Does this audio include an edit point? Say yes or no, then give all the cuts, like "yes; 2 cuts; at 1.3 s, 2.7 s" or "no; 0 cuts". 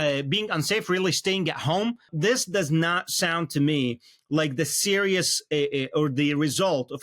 yes; 1 cut; at 2.1 s